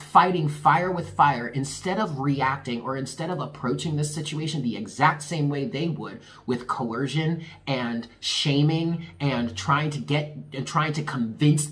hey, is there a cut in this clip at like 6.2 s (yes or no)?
no